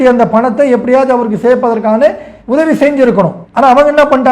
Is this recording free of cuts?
no; 1 cut; at 3.4 s

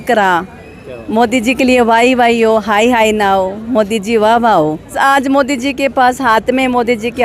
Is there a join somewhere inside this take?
yes; 1 cut; at 5.0 s

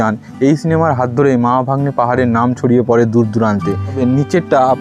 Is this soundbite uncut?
no; 1 cut; at 3.9 s

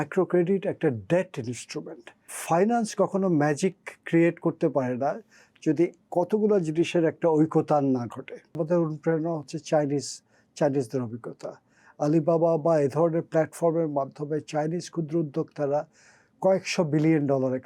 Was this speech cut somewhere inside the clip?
yes; 2 cuts; at 2.3 s, 8.6 s

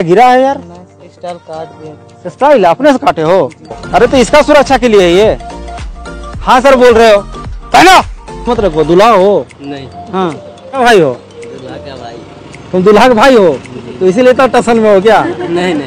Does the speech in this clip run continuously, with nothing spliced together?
no; 2 cuts; at 3.8 s, 8.5 s

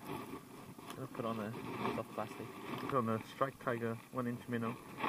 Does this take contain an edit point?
yes; 1 cut; at 2.9 s

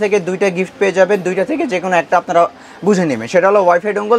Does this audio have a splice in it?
no; 0 cuts

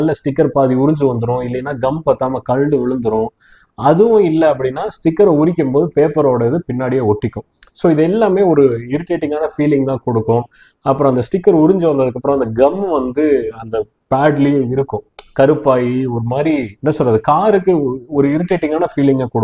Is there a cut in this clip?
no; 0 cuts

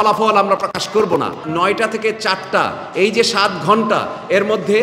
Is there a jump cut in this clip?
yes; 1 cut; at 1.4 s

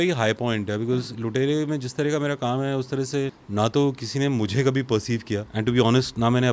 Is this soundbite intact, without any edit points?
no; 2 cuts; at 3.4 s, 5.5 s

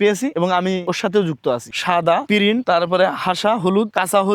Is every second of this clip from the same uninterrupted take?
no; 1 cut; at 1.8 s

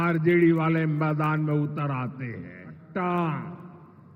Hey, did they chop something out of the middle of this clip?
yes; 1 cut; at 2.8 s

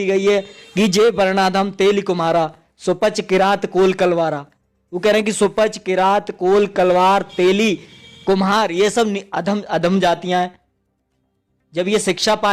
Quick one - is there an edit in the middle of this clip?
no; 0 cuts

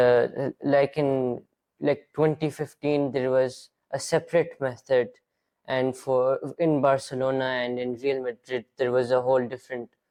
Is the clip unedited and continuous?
yes; 0 cuts

